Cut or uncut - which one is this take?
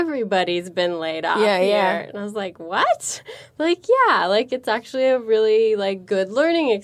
uncut